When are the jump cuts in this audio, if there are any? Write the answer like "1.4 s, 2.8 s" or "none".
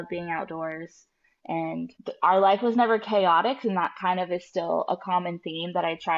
2.0 s